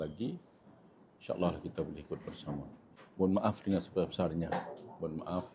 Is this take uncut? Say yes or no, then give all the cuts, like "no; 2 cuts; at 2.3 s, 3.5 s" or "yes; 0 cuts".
no; 1 cut; at 2.8 s